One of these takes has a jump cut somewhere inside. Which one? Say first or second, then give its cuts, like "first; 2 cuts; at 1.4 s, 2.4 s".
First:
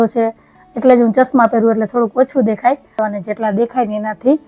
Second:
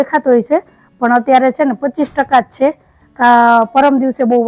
first; 1 cut; at 3.0 s